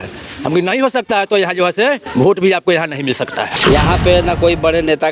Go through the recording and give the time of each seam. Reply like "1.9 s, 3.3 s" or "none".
3.5 s